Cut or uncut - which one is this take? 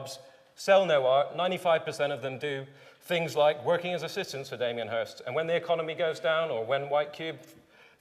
cut